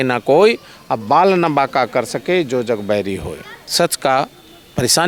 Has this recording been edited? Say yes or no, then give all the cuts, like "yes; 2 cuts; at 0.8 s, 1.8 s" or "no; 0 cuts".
no; 0 cuts